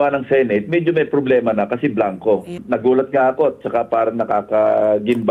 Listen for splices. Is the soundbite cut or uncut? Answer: cut